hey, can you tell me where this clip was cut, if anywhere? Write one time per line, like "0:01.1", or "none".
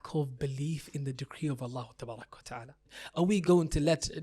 0:03.0